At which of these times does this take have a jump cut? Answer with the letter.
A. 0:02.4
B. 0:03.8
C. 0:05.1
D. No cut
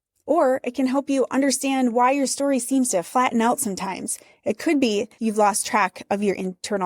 C